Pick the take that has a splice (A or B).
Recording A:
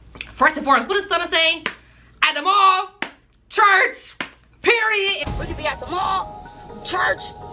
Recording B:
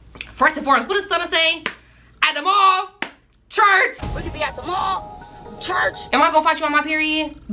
B